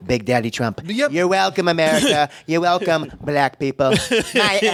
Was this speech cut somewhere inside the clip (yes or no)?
no